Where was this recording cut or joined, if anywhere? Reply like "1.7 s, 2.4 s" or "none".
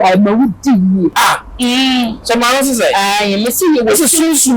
1.1 s